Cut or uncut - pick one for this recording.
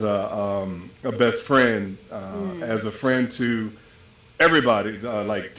uncut